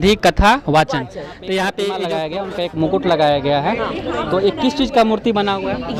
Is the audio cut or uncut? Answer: cut